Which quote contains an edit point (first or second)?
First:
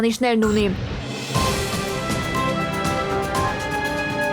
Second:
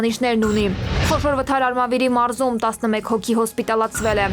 second